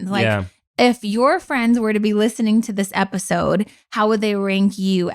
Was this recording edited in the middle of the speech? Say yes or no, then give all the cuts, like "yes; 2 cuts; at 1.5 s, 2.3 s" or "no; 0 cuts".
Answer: no; 0 cuts